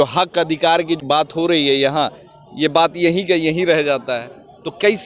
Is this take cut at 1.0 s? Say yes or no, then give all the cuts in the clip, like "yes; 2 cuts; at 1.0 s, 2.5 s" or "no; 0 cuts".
yes; 1 cut; at 1.0 s